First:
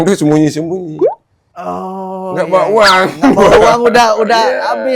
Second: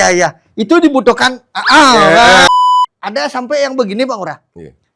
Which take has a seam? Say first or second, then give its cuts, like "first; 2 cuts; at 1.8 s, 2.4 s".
second; 1 cut; at 2.5 s